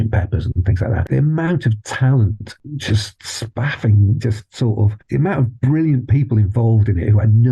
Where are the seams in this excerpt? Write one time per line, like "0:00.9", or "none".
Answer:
0:01.0
0:02.5